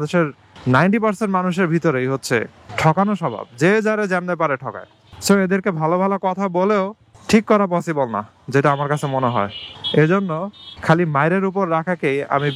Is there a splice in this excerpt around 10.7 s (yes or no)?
no